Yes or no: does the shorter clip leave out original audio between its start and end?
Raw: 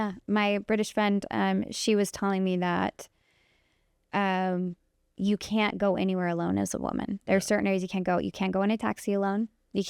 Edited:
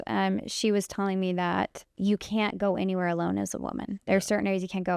yes